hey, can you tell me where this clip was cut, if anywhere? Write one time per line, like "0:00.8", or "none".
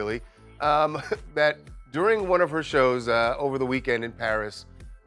none